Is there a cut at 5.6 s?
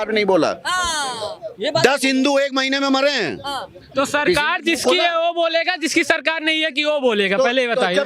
no; 1 cut; at 3.8 s

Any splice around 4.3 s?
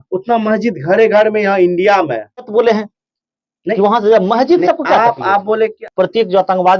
no; 2 cuts; at 2.5 s, 5.8 s

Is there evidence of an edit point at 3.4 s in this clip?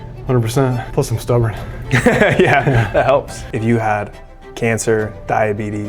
yes; 2 cuts; at 0.8 s, 3.4 s

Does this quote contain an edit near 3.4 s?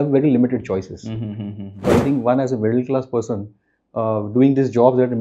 no; 1 cut; at 1.7 s

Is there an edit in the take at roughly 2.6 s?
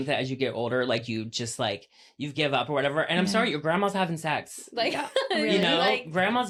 no; 0 cuts

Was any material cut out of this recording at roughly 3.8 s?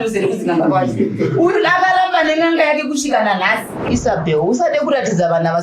yes; 1 cut; at 3.8 s

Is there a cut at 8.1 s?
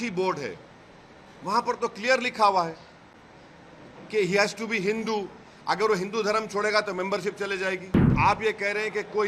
yes; 1 cut; at 8.1 s

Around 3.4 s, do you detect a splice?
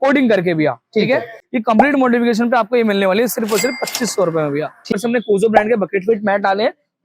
no; 2 cuts; at 1.4 s, 4.9 s

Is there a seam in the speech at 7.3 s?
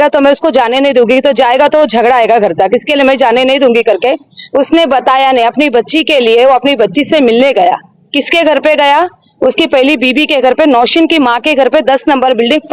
no; 0 cuts

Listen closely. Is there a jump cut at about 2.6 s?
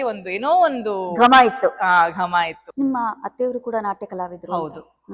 yes; 1 cut; at 2.6 s

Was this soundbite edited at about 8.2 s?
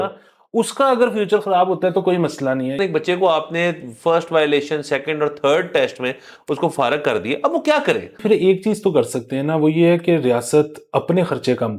yes; 2 cuts; at 2.8 s, 8.2 s

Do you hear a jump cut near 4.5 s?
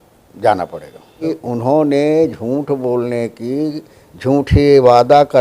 no; 1 cut; at 1.3 s

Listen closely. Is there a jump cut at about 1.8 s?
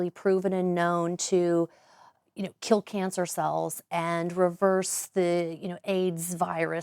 no; 0 cuts

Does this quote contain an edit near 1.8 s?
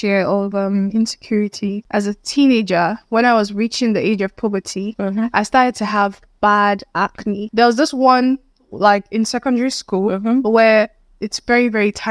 yes; 2 cuts; at 1.8 s, 7.4 s

